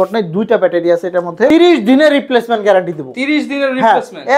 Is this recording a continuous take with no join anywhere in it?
no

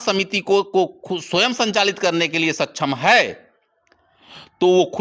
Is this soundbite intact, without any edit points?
yes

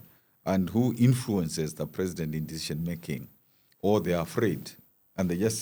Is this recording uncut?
yes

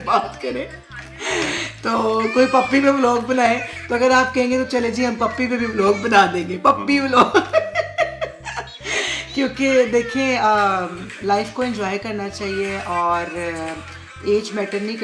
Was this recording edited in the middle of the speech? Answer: no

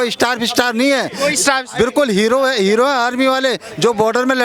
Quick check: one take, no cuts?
yes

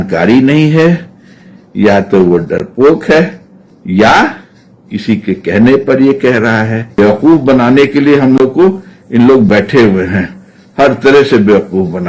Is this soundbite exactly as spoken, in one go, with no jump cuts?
no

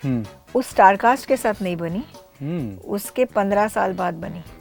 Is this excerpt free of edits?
yes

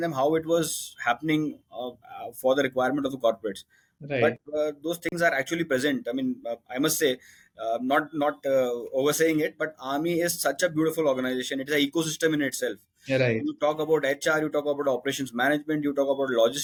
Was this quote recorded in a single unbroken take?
yes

